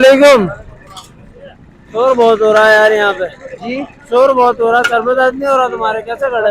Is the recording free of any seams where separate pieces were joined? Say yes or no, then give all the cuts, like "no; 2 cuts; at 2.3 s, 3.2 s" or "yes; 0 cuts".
yes; 0 cuts